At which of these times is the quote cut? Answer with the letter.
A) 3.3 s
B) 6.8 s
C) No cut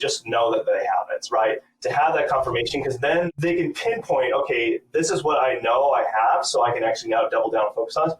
A